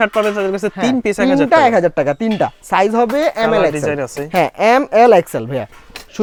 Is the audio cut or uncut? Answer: uncut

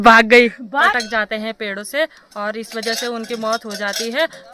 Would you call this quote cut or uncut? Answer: cut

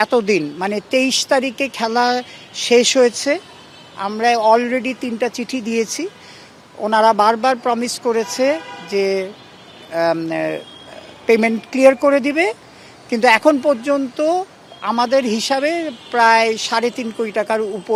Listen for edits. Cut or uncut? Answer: uncut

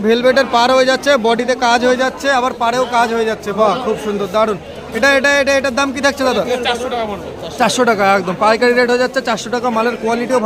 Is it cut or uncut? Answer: uncut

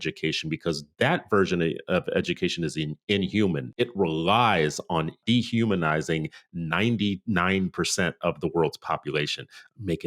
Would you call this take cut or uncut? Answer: cut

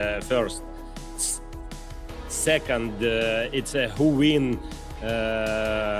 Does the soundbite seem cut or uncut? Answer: uncut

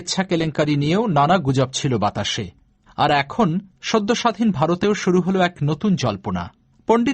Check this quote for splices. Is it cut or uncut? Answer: uncut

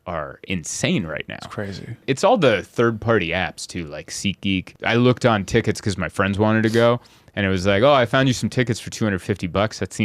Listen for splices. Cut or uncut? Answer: cut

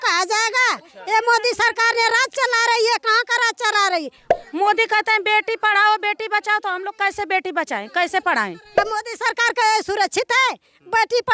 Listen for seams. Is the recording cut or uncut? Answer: cut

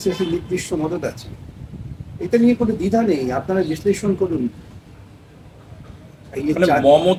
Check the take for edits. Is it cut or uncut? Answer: uncut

